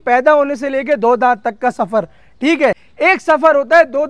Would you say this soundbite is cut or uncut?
cut